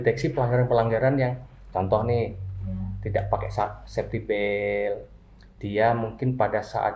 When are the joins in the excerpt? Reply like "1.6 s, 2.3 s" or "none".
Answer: none

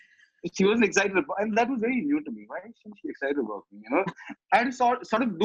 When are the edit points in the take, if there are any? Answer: 4.2 s

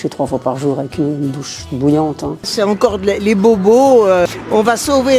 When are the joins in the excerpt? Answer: 2.5 s, 4.3 s

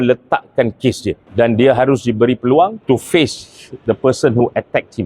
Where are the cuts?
1.2 s, 2.8 s

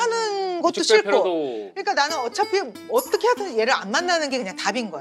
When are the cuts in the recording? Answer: none

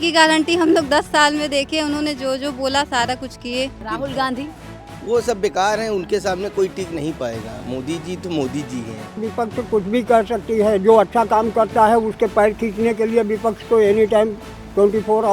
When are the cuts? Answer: 3.8 s, 9.2 s

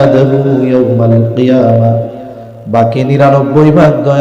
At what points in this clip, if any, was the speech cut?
none

